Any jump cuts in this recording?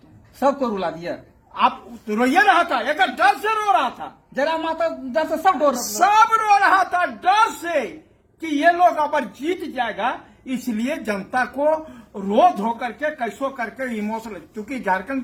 no; 0 cuts

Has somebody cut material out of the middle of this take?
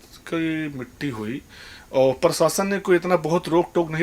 no; 0 cuts

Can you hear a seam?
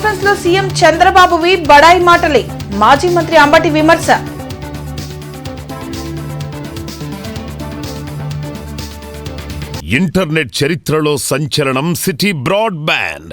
yes; 1 cut; at 9.7 s

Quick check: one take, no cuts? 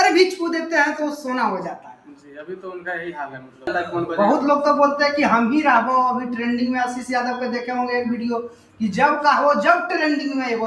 no; 1 cut; at 3.7 s

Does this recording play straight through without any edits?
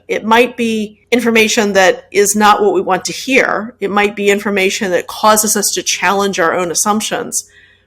no; 1 cut; at 0.9 s

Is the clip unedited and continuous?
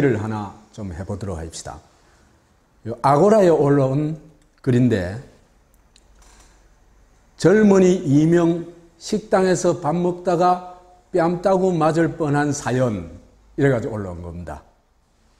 yes; 0 cuts

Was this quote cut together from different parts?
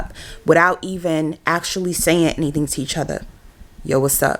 no; 0 cuts

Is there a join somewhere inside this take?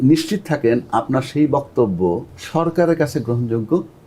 yes; 1 cut; at 2.3 s

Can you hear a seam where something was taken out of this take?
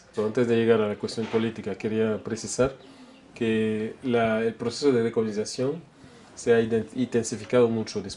yes; 1 cut; at 1.8 s

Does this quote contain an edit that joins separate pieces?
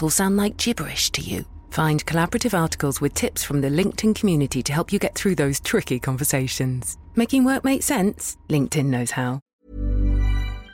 yes; 1 cut; at 9.4 s

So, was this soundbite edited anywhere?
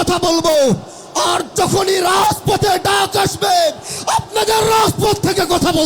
no; 0 cuts

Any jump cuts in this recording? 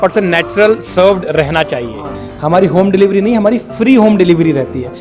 yes; 1 cut; at 2.1 s

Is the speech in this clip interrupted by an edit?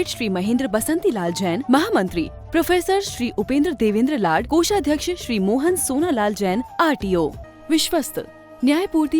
yes; 1 cut; at 7.4 s

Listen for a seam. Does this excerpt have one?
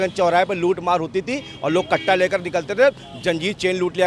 no; 0 cuts

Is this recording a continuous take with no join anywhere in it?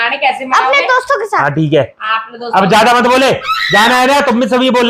yes; 0 cuts

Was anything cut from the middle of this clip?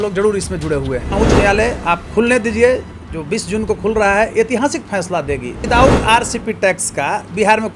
yes; 2 cuts; at 1.1 s, 5.6 s

